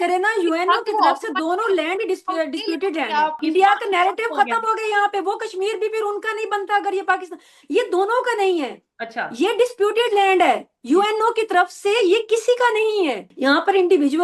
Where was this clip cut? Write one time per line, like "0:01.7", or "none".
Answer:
0:03.4
0:13.3